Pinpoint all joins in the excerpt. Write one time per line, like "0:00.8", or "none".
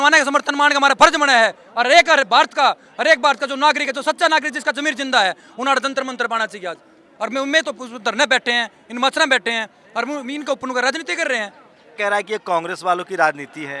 0:07.0
0:11.9

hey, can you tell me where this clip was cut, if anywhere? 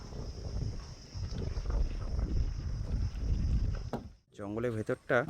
0:04.2

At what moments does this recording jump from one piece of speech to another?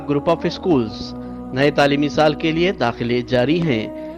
none

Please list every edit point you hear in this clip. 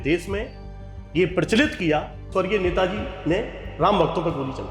0:02.3

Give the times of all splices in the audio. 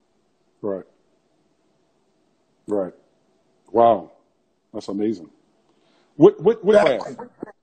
0:06.7

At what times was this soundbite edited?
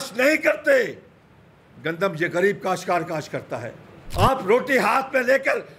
0:04.0

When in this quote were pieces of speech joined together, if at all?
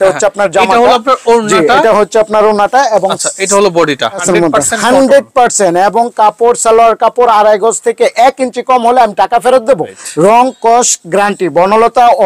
0:04.2
0:09.9

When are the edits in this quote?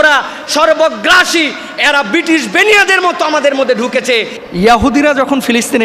0:04.4

